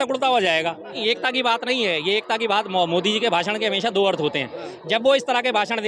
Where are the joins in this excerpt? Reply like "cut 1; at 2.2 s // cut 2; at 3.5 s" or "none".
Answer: cut 1; at 1.0 s